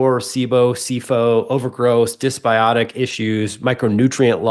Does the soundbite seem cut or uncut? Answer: uncut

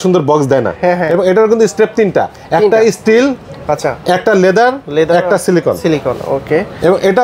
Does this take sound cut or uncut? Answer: cut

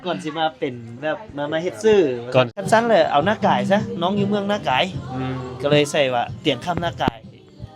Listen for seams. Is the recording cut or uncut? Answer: cut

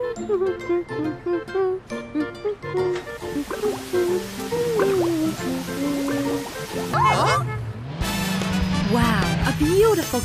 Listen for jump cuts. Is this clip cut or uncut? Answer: cut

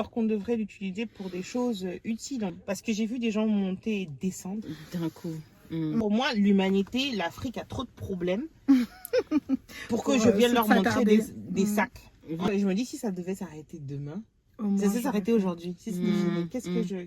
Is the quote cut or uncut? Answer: cut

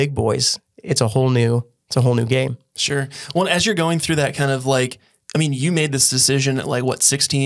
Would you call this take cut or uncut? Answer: uncut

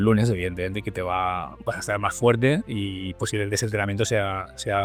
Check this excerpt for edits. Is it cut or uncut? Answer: uncut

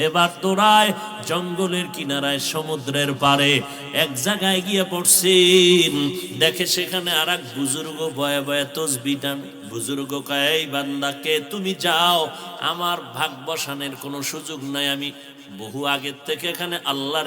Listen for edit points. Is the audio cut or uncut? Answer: cut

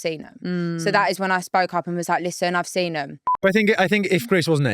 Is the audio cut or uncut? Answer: cut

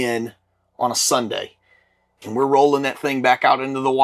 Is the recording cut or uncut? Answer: uncut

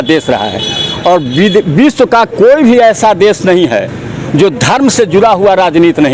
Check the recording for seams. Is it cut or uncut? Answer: uncut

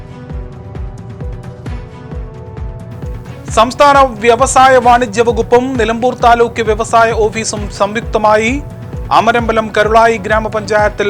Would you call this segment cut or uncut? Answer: cut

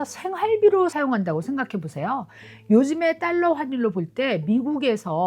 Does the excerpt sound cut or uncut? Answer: uncut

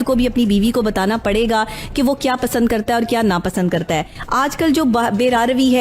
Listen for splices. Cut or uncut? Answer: uncut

